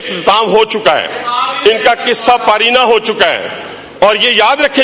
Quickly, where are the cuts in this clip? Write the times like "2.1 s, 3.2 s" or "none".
none